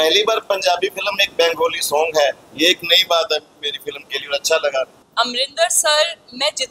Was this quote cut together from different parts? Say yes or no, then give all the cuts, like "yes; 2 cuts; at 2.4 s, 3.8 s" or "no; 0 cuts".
yes; 1 cut; at 5.0 s